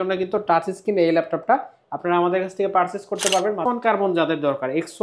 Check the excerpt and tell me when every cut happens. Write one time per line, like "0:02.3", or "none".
0:03.6

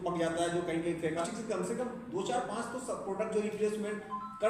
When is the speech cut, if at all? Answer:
0:01.2

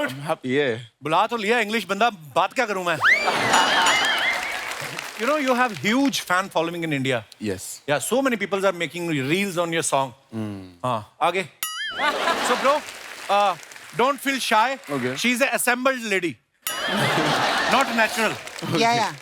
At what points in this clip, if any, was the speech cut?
0:05.0
0:12.5

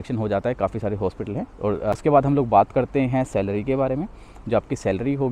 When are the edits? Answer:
0:01.9

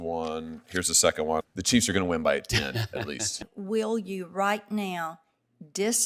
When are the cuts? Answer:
0:01.4
0:03.4

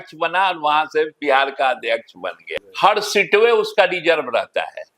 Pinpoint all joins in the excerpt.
0:02.6

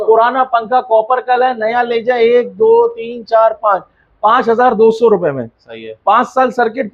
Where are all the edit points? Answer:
none

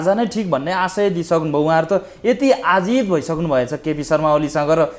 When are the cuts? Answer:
none

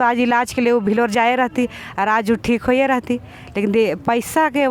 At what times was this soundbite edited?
none

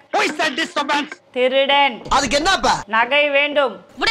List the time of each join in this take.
none

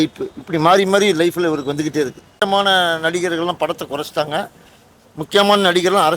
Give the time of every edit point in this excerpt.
0:02.4

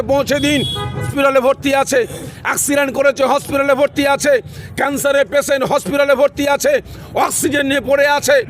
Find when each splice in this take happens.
0:01.1

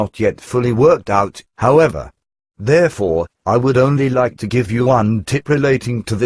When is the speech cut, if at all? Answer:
0:01.0

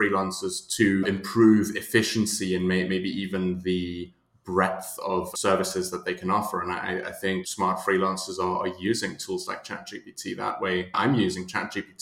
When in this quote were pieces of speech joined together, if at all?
0:01.0
0:05.3
0:07.5
0:11.0

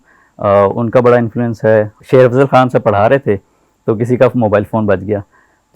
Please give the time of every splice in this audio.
0:02.0

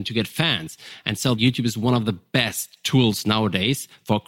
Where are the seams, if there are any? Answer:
0:01.4

